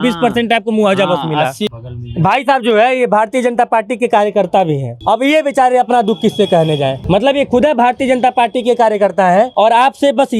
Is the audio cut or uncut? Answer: cut